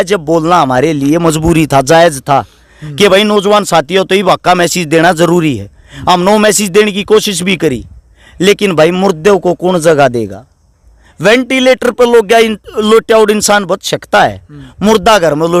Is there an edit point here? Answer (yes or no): no